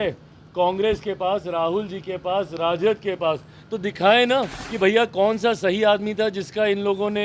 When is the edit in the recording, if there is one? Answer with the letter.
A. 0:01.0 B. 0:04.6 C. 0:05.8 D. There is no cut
B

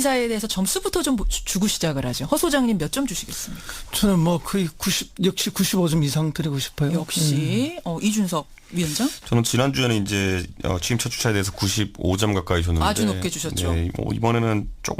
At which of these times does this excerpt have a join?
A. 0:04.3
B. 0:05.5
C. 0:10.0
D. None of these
A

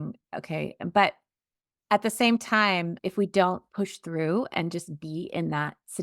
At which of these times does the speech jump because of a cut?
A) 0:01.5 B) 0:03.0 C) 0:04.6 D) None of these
B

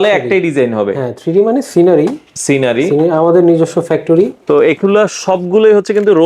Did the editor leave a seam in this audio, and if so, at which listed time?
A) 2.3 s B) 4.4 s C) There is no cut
B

